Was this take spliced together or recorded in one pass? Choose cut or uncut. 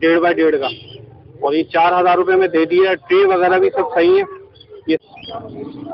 cut